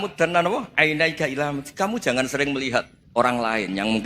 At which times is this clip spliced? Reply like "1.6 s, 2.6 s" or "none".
3.0 s